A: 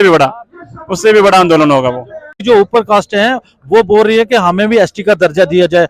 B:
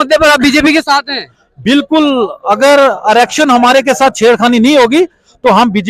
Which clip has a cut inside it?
A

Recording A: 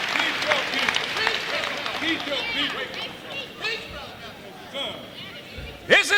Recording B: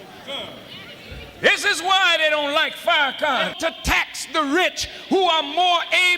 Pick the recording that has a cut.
B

